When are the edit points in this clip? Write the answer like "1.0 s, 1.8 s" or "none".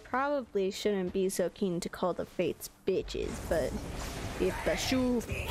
none